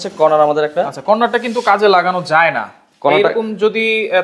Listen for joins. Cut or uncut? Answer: uncut